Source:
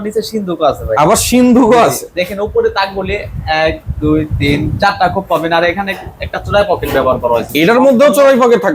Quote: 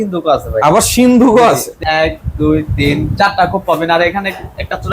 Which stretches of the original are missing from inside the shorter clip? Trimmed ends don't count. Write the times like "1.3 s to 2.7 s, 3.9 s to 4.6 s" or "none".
2.0 s to 3.3 s